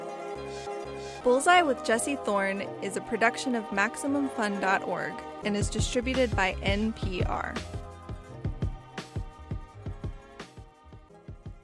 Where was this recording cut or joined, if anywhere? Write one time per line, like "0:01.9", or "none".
none